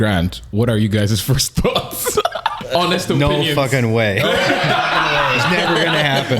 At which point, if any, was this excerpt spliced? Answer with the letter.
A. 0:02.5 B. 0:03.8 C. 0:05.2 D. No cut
A